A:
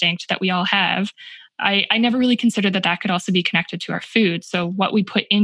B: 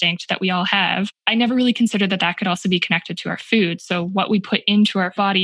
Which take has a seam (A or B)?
B